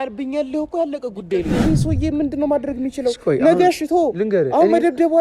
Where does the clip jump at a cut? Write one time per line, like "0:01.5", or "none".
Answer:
0:01.6